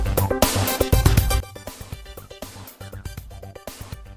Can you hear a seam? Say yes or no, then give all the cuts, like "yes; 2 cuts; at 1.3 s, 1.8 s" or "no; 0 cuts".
no; 0 cuts